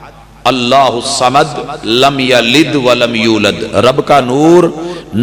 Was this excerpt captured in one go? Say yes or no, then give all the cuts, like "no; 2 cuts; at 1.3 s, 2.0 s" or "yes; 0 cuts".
yes; 0 cuts